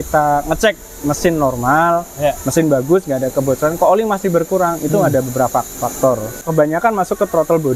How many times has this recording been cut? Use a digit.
1